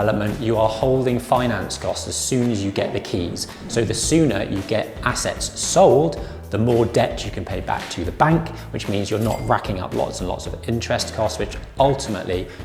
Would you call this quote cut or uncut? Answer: uncut